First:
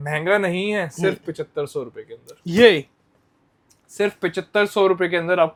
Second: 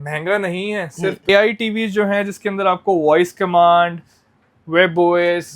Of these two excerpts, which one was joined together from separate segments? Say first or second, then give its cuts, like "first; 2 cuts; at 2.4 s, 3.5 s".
second; 1 cut; at 1.3 s